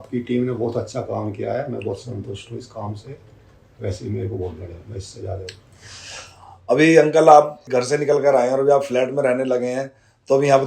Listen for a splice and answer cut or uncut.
cut